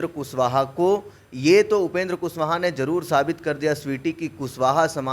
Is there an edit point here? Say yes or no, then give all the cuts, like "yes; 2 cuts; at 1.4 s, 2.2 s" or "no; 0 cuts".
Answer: no; 0 cuts